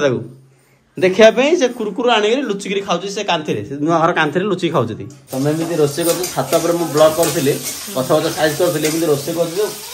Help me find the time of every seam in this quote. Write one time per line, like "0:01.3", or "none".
0:05.2